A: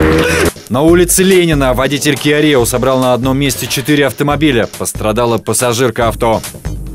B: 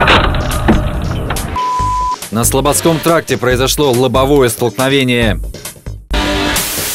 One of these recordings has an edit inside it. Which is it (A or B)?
B